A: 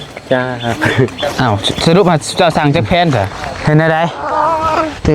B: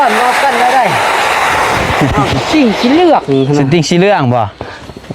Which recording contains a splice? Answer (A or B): A